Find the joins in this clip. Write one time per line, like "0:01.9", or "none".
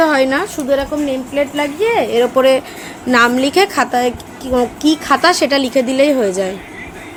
none